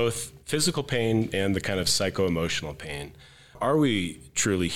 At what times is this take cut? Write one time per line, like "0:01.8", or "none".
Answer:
0:03.5